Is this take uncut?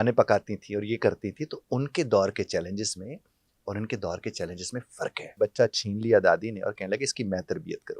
no; 1 cut; at 5.4 s

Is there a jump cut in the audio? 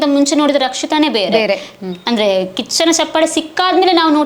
no; 0 cuts

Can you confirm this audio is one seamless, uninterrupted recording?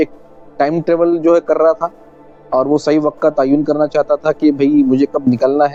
yes; 0 cuts

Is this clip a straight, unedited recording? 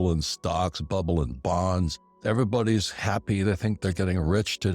no; 1 cut; at 2.0 s

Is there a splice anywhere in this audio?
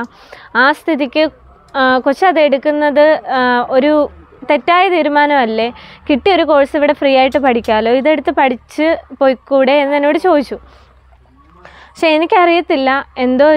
no; 0 cuts

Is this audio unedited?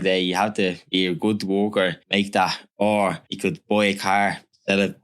no; 3 cuts; at 0.8 s, 2.0 s, 3.3 s

